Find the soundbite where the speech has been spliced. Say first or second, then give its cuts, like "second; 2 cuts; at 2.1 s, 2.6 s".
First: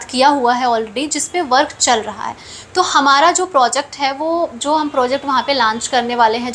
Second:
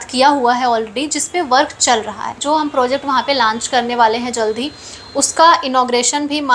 second; 1 cut; at 2.4 s